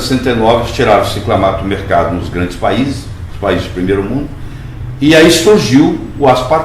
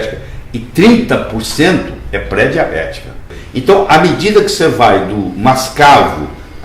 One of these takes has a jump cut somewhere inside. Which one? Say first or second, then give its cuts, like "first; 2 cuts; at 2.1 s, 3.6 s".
second; 1 cut; at 3.3 s